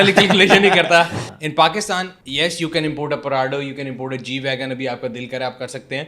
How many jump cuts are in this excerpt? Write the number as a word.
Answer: two